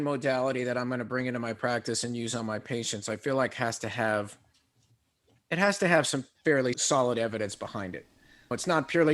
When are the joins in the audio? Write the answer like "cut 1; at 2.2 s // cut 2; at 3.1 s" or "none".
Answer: none